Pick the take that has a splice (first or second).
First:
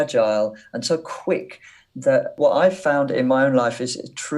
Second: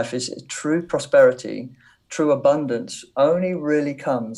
first